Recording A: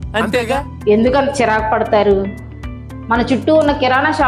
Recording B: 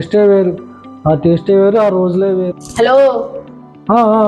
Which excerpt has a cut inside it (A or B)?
B